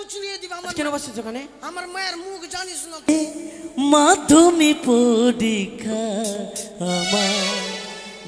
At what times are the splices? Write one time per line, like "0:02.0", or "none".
0:03.1